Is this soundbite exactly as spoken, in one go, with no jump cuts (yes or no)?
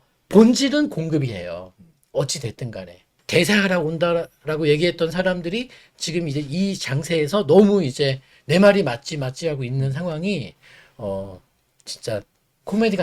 yes